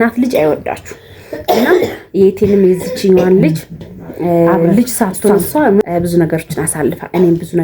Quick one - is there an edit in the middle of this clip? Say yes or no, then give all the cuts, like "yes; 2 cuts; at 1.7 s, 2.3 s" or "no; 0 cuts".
yes; 1 cut; at 5.8 s